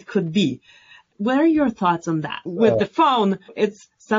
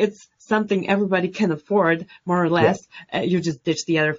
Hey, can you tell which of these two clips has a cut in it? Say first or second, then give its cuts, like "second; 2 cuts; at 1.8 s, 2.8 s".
first; 1 cut; at 2.5 s